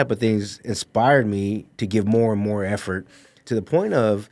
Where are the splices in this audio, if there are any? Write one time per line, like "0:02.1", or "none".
0:03.4

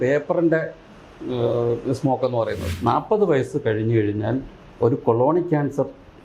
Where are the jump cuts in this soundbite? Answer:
0:02.7

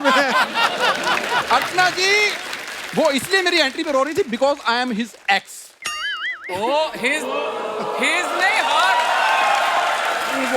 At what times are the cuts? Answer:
none

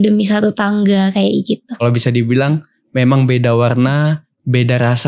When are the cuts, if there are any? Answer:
0:01.8

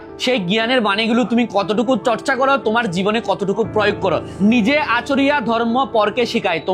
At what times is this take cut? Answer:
none

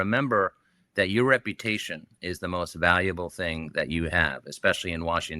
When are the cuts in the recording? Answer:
none

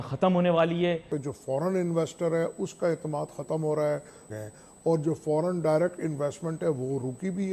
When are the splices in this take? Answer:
0:01.1
0:04.3

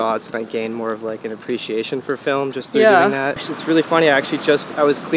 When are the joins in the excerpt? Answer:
0:03.4

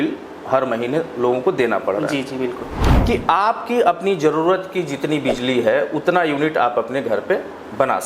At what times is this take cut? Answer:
0:02.8

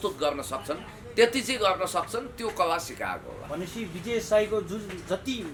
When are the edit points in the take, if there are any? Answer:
none

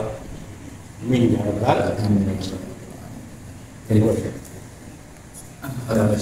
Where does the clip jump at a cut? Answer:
none

